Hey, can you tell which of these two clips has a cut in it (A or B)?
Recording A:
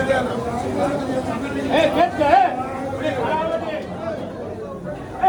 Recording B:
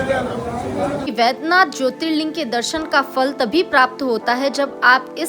B